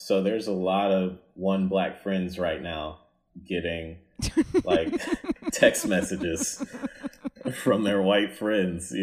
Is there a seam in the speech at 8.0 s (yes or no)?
no